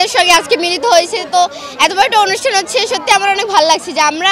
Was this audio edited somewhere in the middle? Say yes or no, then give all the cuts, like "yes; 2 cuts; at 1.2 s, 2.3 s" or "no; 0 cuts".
no; 0 cuts